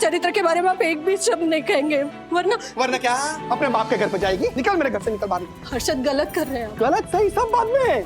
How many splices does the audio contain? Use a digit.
2